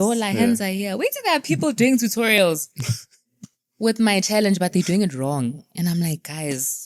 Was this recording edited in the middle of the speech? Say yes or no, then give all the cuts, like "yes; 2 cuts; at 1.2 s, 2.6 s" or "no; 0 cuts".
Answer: no; 0 cuts